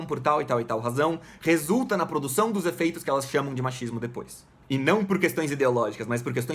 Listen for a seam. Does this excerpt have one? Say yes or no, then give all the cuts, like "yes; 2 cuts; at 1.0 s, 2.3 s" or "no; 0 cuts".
yes; 1 cut; at 4.6 s